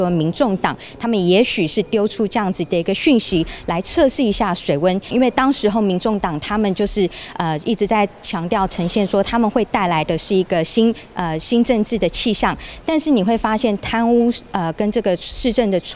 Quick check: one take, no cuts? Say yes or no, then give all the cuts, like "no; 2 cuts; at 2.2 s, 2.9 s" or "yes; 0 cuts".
no; 1 cut; at 5.1 s